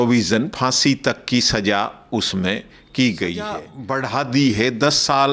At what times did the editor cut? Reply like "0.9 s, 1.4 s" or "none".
3.7 s